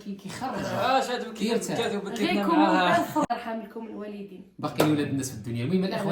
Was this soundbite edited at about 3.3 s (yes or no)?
yes